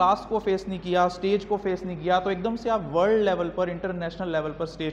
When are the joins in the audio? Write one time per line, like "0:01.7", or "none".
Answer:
none